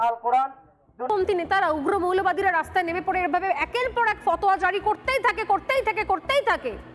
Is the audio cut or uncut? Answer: cut